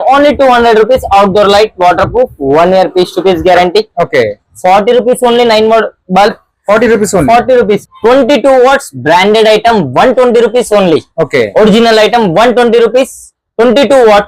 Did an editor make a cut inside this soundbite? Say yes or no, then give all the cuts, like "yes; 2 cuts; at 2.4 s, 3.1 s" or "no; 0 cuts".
yes; 1 cut; at 7.8 s